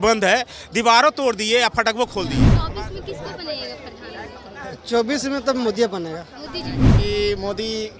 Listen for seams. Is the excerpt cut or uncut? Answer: cut